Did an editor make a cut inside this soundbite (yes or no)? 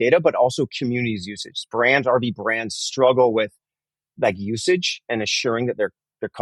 no